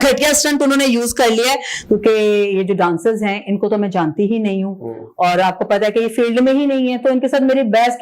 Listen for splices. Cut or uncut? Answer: cut